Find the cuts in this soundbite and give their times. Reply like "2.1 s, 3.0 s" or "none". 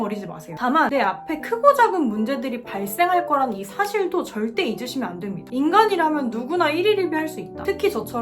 5.4 s

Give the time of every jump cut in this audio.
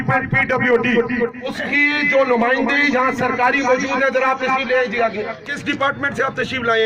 1.5 s, 5.5 s

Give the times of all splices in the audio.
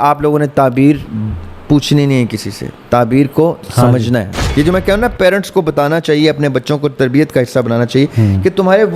4.4 s

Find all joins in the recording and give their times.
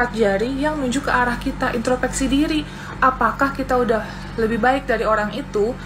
none

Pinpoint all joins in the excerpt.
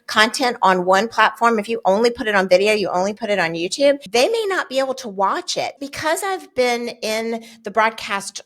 4.0 s, 5.7 s

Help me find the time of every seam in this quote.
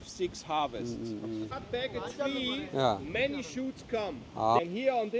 1.4 s

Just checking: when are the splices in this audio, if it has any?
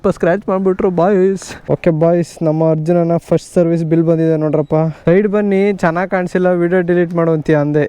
1.5 s, 4.9 s

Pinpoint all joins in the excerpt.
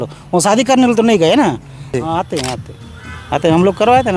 1.9 s

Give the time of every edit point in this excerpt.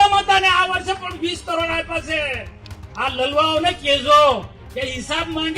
4.6 s

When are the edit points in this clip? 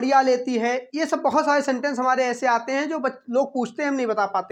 none

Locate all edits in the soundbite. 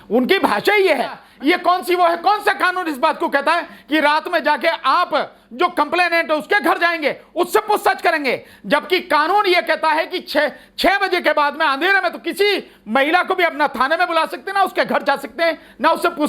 1.2 s

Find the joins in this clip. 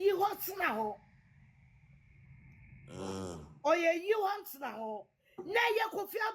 none

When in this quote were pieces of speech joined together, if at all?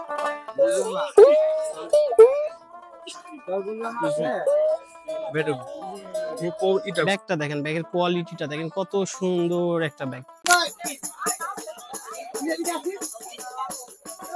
6.9 s, 10.3 s

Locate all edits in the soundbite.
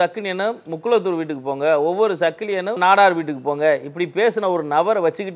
2.8 s

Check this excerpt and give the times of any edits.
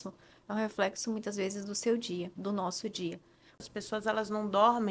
3.6 s

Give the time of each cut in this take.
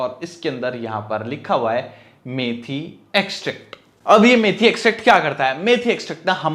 none

